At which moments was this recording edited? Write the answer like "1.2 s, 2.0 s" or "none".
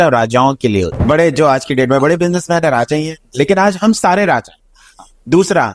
0.9 s

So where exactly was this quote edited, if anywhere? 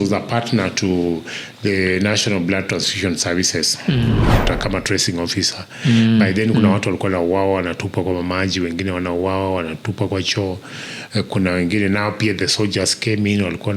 4.4 s

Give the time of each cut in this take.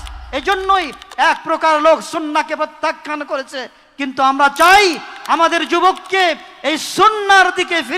none

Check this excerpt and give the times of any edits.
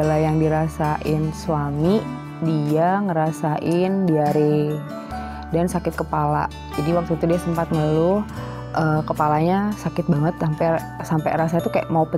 none

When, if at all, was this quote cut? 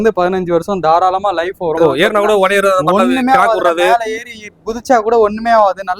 1.8 s

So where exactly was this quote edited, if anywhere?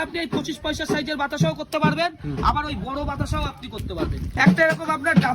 4.2 s

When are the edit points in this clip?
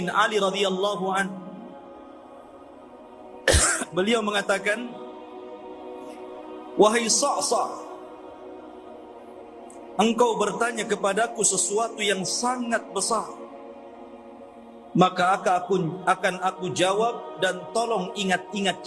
1.9 s, 3.3 s, 5.2 s, 6.8 s, 7.9 s, 10.0 s, 13.4 s, 14.9 s

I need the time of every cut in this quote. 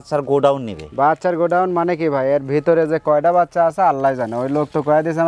none

